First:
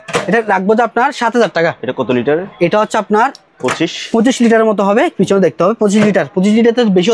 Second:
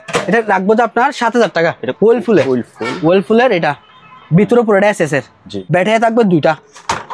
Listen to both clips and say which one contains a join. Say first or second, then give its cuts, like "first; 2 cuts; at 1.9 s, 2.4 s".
second; 2 cuts; at 1.8 s, 5.6 s